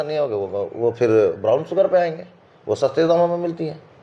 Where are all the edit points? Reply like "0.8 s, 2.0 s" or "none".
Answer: none

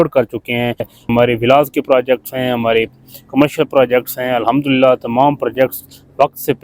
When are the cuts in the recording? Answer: 0.9 s

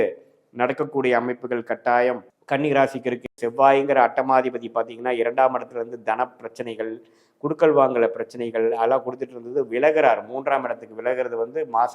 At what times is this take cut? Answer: 2.3 s, 3.3 s

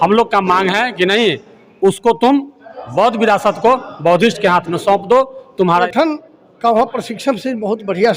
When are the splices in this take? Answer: 5.9 s

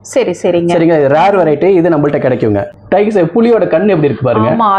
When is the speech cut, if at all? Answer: 2.7 s

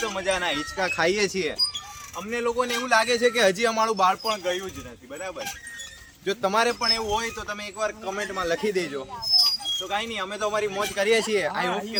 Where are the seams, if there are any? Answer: none

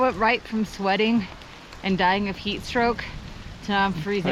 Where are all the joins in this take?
none

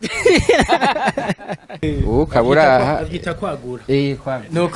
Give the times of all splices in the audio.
1.8 s

